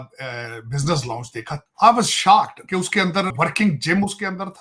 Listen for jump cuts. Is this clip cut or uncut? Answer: cut